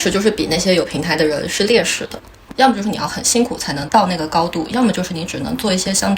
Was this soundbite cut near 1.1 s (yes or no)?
no